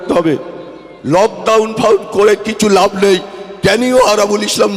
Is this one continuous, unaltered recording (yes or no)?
yes